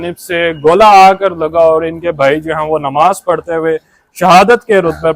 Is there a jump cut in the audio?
no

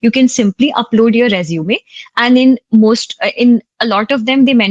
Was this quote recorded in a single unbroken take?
yes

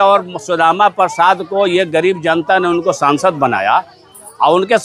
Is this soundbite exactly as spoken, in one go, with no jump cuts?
yes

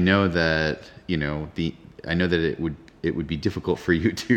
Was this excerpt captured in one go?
yes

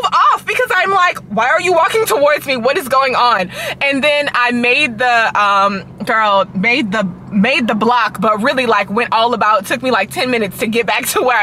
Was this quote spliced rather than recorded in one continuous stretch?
no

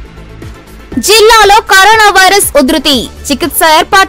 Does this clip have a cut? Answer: no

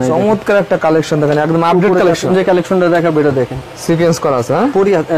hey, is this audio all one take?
no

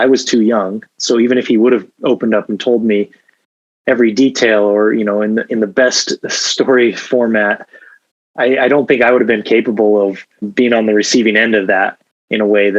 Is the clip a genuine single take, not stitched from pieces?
no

